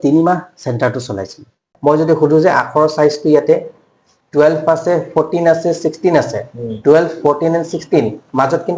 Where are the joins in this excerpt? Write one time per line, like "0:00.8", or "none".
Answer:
0:01.7